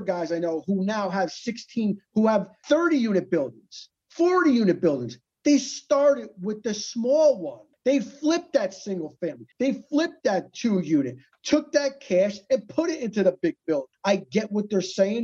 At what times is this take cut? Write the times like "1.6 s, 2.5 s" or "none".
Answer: 13.9 s